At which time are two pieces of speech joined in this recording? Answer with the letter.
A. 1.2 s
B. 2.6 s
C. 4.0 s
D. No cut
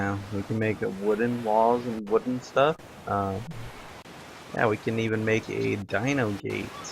A